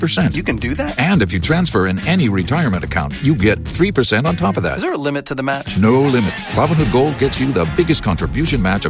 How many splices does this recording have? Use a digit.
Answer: 0